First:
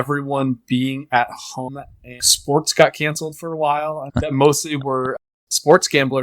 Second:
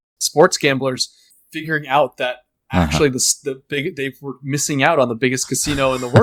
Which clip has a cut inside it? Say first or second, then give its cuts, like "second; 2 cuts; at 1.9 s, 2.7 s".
first; 2 cuts; at 2.3 s, 4.1 s